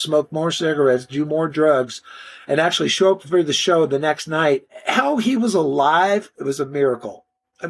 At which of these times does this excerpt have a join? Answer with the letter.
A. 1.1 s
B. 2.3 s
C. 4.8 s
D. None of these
C